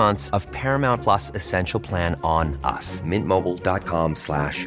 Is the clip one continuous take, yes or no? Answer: yes